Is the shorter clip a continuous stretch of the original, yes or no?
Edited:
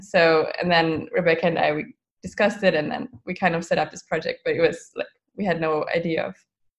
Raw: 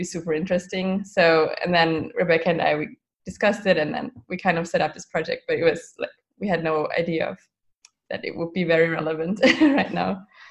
yes